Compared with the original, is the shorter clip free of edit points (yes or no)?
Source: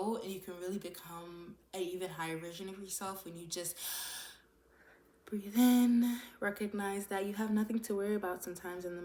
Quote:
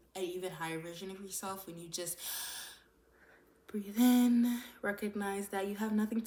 yes